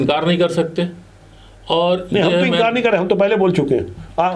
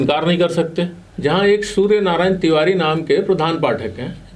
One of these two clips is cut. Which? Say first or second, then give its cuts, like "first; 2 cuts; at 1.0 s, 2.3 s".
second; 1 cut; at 1.0 s